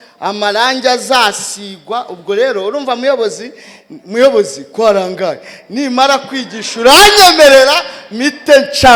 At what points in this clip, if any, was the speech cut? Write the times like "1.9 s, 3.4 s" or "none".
none